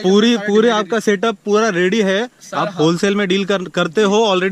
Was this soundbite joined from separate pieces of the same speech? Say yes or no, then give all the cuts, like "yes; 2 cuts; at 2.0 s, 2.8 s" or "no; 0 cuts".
no; 0 cuts